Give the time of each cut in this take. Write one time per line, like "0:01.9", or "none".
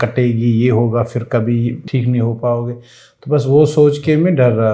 0:01.8